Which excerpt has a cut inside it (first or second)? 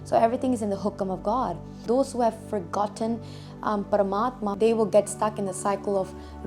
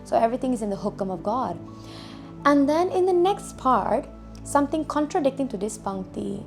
first